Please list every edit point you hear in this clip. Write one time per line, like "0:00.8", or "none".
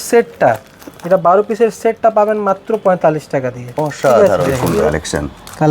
0:04.7